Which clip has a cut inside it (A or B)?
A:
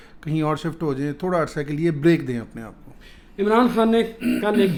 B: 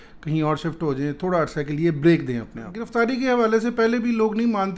B